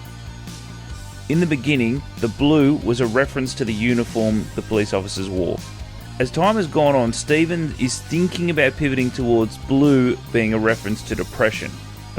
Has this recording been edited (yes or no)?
yes